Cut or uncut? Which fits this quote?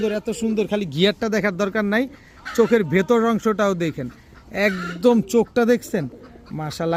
uncut